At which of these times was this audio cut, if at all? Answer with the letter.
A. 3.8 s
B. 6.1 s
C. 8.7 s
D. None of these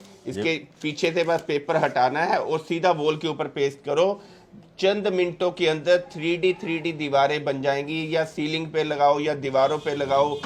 D